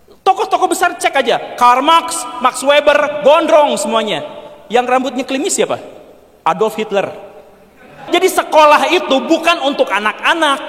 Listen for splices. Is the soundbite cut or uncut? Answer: cut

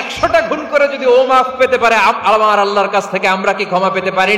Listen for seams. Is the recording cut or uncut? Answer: uncut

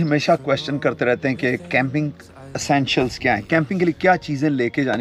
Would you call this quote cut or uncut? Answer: uncut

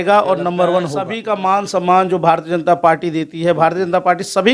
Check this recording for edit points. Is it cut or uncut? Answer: cut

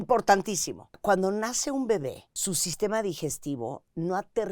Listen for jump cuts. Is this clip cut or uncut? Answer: cut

